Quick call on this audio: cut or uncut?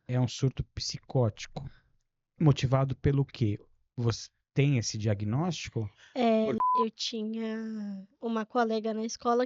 cut